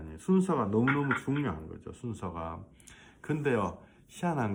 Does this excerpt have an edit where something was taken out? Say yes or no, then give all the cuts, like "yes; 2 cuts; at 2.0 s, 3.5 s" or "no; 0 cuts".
no; 0 cuts